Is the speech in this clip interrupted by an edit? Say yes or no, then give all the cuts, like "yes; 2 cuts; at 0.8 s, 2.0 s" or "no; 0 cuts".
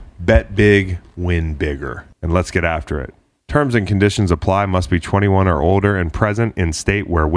yes; 1 cut; at 2.0 s